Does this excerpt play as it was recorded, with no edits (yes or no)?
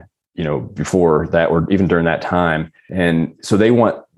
yes